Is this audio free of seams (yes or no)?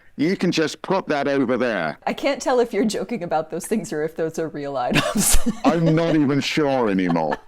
no